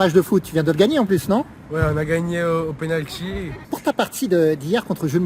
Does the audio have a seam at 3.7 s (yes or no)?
yes